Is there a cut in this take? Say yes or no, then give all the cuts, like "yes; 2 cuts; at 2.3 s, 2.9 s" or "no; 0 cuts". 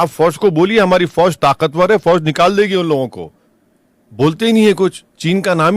no; 0 cuts